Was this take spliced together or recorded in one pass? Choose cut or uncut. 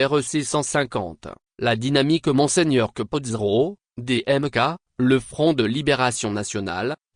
cut